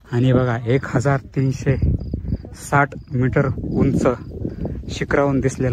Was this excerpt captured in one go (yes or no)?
yes